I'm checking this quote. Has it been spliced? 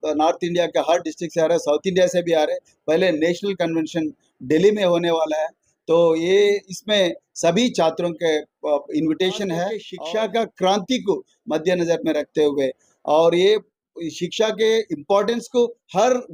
yes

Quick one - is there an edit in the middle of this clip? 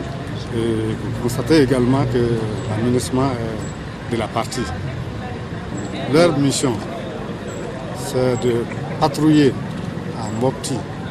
yes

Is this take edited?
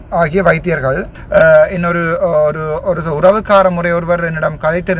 yes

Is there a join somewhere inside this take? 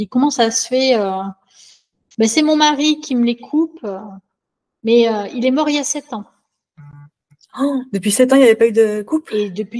no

